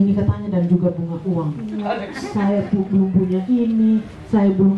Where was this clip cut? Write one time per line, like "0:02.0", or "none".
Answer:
0:01.9